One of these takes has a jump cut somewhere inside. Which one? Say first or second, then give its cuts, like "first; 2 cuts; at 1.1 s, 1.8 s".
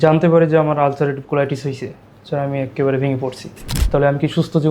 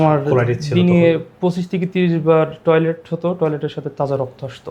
first; 1 cut; at 3.7 s